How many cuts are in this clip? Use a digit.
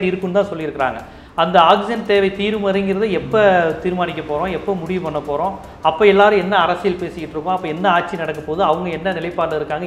0